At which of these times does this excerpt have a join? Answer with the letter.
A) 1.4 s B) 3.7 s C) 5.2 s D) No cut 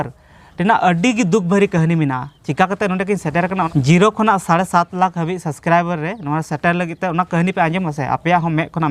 B